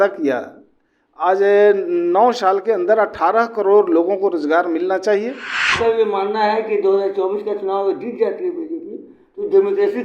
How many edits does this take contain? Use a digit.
1